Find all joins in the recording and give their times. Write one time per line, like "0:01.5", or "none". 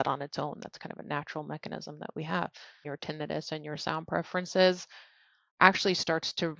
0:02.8